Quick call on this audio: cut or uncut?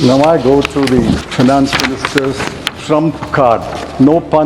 cut